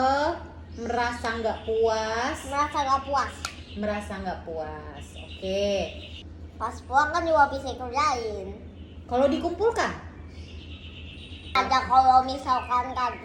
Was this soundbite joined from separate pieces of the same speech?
yes; 2 cuts; at 6.1 s, 11.6 s

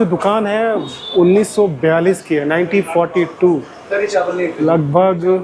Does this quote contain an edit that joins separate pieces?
no; 0 cuts

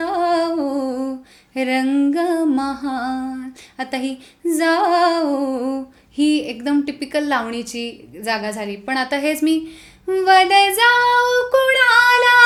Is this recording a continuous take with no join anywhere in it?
yes; 0 cuts

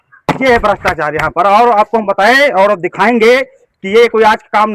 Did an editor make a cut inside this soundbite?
no; 0 cuts

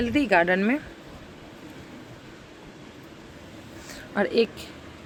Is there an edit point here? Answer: no; 0 cuts

